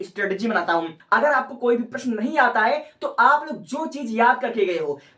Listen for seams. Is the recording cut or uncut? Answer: cut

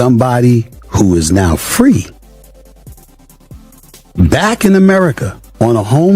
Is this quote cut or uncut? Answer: cut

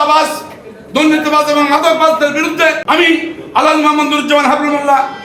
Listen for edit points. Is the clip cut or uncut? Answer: cut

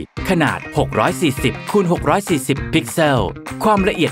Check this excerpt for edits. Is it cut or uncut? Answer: uncut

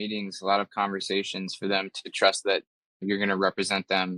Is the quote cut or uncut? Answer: cut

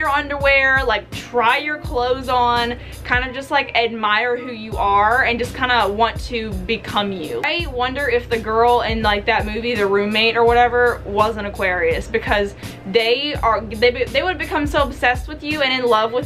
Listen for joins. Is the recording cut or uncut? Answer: uncut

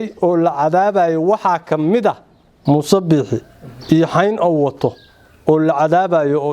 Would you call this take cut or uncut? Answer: cut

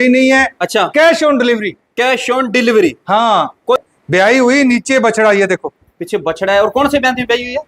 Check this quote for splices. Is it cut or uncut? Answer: cut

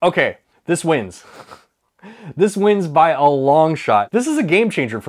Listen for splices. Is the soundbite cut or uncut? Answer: cut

